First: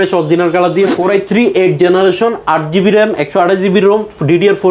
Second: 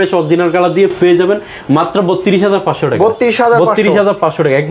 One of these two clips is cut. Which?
first; 1 cut; at 0.9 s

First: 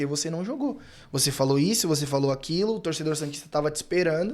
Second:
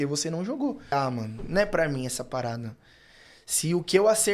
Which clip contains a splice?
second; 1 cut; at 0.9 s

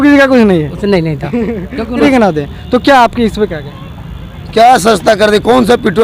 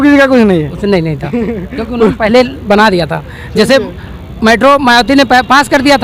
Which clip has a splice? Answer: first; 1 cut; at 1.9 s

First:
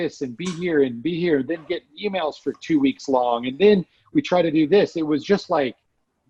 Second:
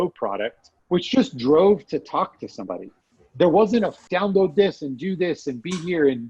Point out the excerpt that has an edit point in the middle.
second; 1 cut; at 4.0 s

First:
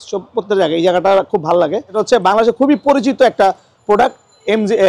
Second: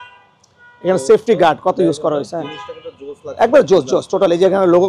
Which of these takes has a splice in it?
first; 1 cut; at 1.9 s

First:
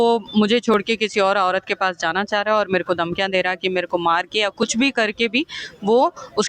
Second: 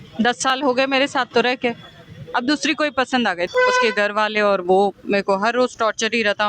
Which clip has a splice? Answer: second; 1 cut; at 3.5 s

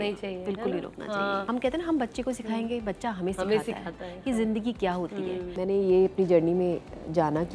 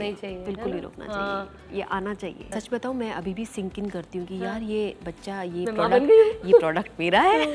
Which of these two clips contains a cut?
first; 2 cuts; at 1.4 s, 5.5 s

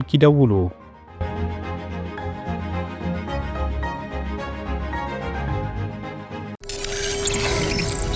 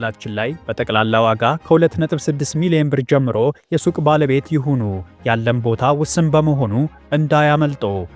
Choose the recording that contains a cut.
first; 1 cut; at 6.6 s

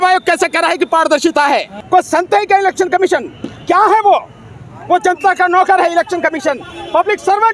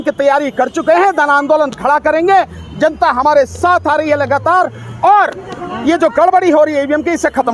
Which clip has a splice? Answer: first; 1 cut; at 1.8 s

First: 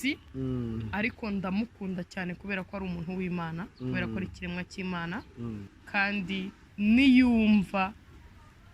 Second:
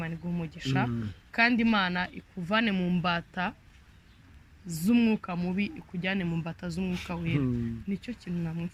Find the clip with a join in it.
first; 2 cuts; at 5.7 s, 6.6 s

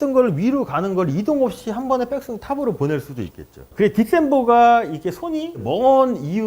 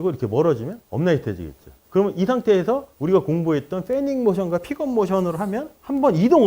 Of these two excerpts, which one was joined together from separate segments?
first; 1 cut; at 3.6 s

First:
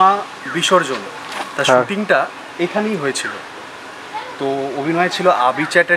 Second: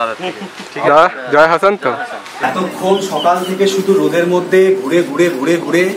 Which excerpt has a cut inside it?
second; 1 cut; at 2.3 s

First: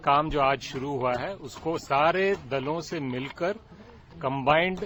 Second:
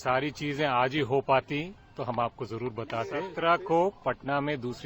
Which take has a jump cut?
second; 1 cut; at 3.3 s

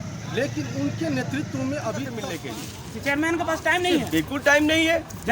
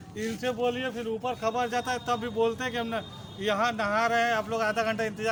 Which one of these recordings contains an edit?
first; 1 cut; at 2.2 s

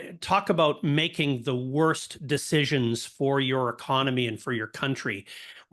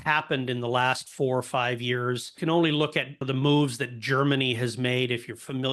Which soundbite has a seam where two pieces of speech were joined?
second; 1 cut; at 3.2 s

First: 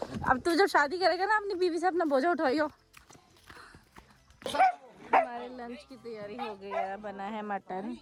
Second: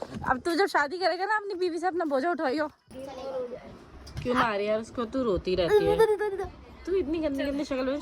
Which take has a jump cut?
second; 1 cut; at 2.8 s

